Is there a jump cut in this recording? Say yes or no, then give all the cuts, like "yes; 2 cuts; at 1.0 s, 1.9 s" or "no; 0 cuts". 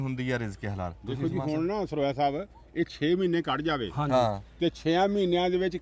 no; 0 cuts